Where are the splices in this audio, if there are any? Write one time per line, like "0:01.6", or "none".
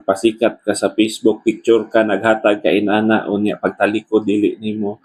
none